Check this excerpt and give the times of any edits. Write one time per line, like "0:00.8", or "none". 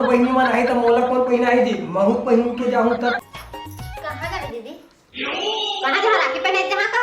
0:03.2